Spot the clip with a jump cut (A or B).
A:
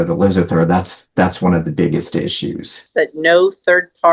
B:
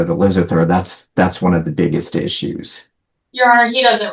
A